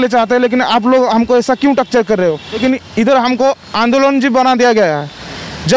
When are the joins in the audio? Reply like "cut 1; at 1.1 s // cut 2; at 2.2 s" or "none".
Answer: cut 1; at 2.6 s